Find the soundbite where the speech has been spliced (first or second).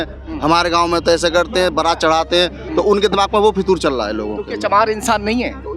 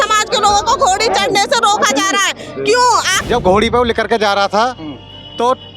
second